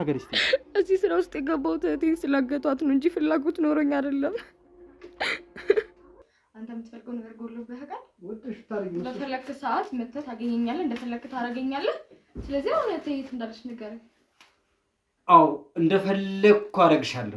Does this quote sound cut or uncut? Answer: cut